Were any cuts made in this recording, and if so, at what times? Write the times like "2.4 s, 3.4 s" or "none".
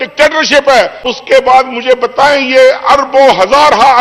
1.1 s